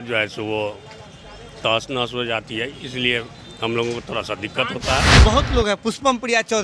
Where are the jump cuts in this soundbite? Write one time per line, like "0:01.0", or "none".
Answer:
0:05.1